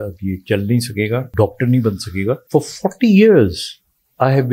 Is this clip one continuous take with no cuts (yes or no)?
no